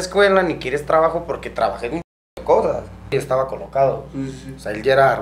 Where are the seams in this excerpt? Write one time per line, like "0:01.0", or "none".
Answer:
0:03.1